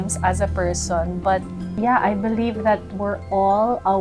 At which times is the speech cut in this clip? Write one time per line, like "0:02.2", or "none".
0:01.6

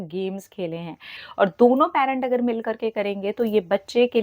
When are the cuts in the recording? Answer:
0:01.2

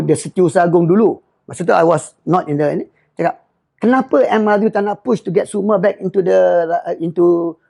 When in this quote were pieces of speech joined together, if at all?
none

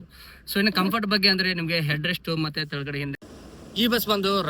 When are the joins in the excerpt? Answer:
0:03.2

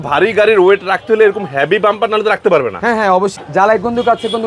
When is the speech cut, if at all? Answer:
0:03.3

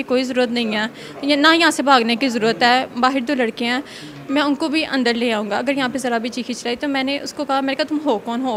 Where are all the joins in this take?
none

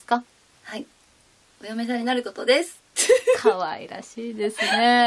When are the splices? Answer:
0:02.4

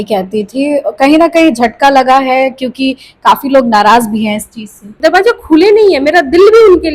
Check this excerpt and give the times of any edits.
0:05.0

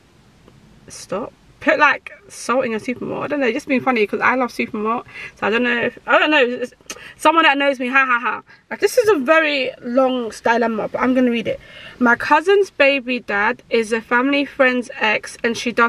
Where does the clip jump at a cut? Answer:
none

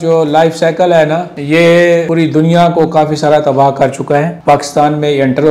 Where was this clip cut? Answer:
0:01.3
0:02.1
0:04.3

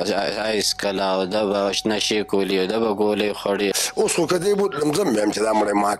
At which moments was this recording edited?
0:03.8

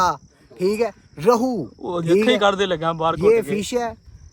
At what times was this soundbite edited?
none

